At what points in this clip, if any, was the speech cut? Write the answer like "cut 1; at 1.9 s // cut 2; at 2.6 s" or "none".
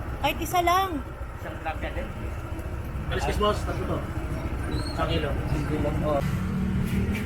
cut 1; at 6.2 s